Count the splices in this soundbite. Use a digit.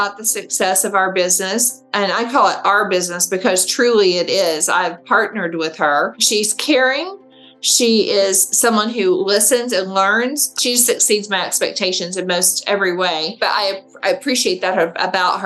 3